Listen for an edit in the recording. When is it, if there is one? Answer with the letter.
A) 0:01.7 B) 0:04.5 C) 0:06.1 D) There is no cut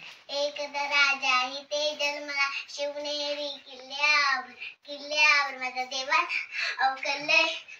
D